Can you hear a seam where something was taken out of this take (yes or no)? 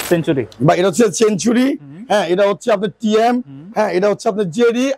no